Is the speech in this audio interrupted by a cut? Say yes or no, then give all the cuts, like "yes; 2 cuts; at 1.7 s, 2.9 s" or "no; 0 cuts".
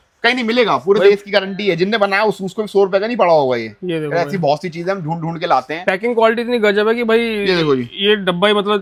no; 0 cuts